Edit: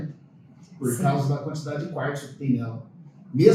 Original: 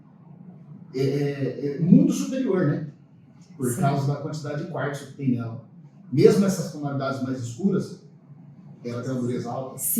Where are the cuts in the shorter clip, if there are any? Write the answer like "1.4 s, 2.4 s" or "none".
none